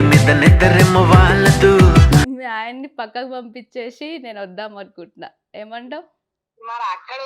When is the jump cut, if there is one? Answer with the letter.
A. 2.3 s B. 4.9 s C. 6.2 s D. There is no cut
A